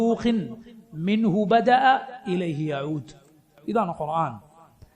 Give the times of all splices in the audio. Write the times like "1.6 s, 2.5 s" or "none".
3.5 s